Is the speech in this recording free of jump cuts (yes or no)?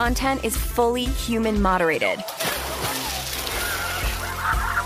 yes